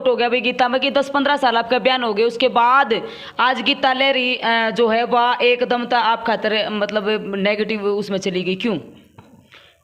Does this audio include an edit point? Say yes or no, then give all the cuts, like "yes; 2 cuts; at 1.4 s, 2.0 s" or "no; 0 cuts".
no; 0 cuts